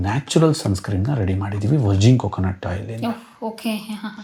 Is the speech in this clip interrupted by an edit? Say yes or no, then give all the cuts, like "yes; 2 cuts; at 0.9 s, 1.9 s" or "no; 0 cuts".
no; 0 cuts